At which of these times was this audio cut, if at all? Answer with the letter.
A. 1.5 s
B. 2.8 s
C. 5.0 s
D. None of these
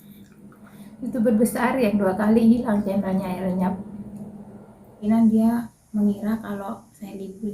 C